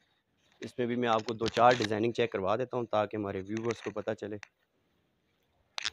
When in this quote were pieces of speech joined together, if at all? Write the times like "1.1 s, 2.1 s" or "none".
none